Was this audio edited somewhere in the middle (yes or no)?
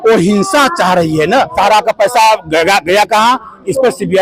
yes